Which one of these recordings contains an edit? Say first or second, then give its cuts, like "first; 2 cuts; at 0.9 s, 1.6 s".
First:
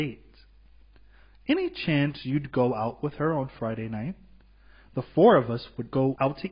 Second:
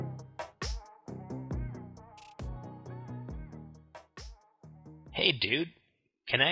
second; 1 cut; at 5.1 s